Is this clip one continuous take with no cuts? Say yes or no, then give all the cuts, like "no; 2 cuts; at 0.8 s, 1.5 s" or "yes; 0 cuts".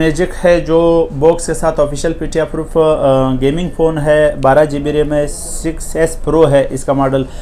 yes; 0 cuts